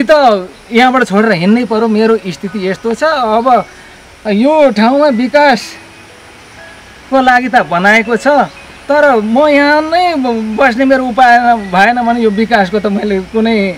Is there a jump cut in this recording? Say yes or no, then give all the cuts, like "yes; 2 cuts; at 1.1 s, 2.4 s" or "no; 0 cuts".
no; 0 cuts